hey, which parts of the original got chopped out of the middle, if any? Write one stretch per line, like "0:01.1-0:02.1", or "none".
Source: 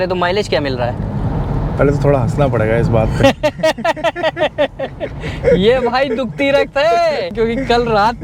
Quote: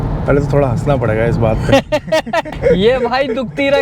0:04.0-0:05.3